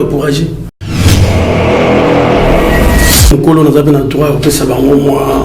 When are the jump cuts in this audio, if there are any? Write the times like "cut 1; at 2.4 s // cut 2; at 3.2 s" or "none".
cut 1; at 0.8 s // cut 2; at 3.2 s